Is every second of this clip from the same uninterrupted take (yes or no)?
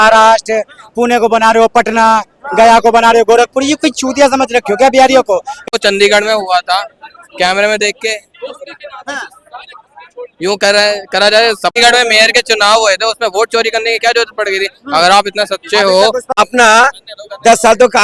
no